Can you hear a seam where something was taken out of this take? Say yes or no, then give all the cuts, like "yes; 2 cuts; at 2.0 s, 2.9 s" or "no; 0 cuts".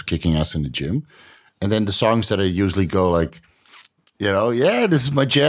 no; 0 cuts